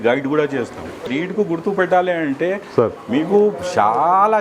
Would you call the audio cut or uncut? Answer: cut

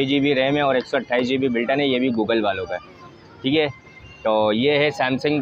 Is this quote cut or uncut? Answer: uncut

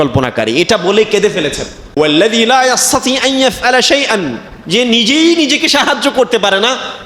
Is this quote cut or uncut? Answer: cut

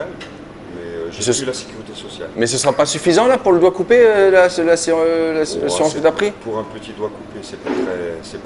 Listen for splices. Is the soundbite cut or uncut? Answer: uncut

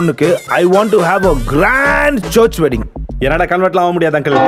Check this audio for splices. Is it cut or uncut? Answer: uncut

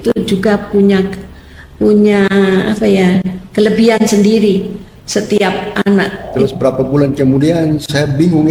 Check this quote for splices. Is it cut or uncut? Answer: cut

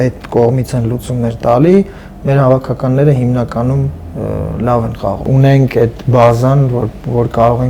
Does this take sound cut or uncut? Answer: cut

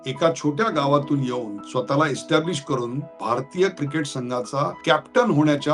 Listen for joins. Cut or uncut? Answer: cut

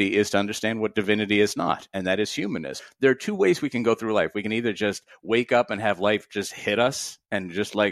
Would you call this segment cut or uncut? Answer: cut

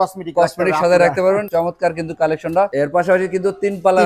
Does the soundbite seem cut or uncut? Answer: cut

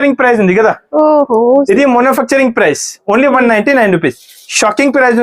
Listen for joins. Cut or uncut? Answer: uncut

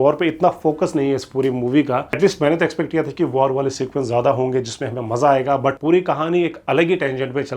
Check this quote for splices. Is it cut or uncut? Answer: cut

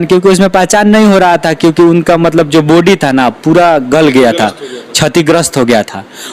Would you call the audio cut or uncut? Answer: uncut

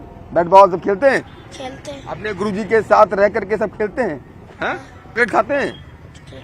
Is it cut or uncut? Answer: cut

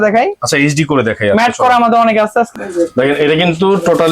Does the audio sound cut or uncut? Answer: cut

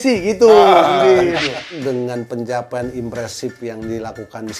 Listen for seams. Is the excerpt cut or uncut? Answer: cut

